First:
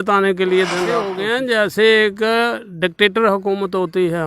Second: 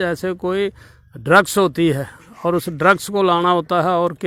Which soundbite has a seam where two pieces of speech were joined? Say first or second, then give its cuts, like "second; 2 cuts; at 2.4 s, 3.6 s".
first; 1 cut; at 1.2 s